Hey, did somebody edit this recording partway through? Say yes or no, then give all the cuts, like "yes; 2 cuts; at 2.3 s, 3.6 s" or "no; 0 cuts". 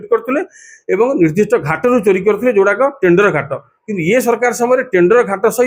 no; 0 cuts